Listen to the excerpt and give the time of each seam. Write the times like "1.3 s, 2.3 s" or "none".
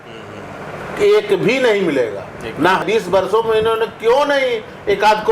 2.8 s